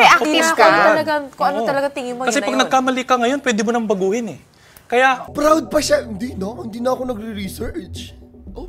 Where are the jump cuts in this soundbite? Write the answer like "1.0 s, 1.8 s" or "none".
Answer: none